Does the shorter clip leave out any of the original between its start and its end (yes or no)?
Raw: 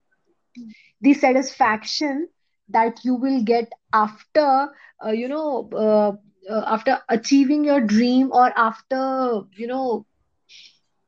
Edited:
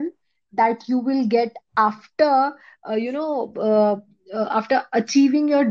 no